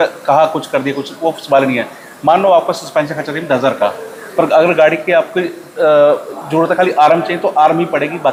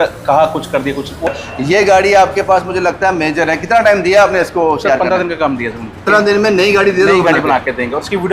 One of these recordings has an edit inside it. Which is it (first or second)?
second